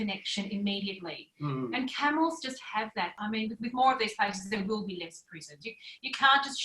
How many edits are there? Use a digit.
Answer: 1